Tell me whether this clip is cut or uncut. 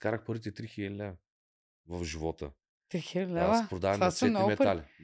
uncut